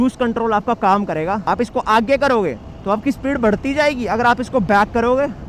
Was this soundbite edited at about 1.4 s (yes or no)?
yes